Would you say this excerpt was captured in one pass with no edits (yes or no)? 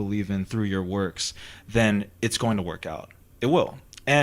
yes